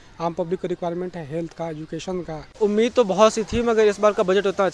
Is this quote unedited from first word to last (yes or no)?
no